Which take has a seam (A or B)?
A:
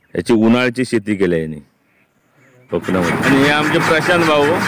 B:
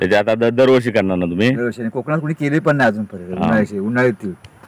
A